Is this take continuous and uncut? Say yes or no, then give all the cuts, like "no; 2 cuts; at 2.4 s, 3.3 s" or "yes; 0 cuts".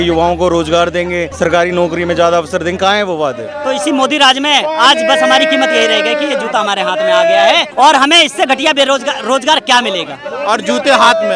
no; 4 cuts; at 1.3 s, 3.5 s, 7.7 s, 10.3 s